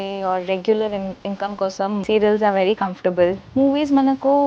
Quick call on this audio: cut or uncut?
cut